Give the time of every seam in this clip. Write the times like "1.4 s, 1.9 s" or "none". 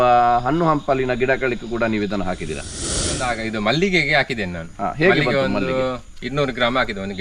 2.9 s